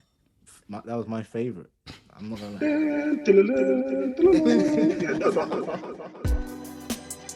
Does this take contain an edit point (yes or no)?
yes